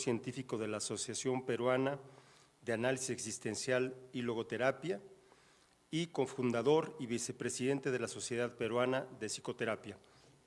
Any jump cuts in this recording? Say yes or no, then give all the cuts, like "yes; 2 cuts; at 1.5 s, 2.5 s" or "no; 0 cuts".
no; 0 cuts